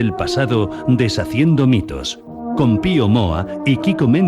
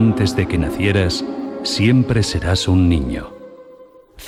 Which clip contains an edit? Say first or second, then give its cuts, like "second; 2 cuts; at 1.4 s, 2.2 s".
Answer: first; 1 cut; at 2.2 s